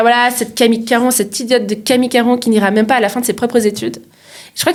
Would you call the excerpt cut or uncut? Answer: uncut